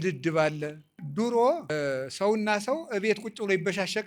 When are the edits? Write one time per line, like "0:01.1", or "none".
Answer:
0:01.0
0:01.7